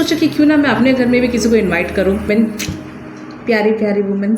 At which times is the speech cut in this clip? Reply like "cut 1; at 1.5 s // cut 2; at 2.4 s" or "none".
cut 1; at 2.3 s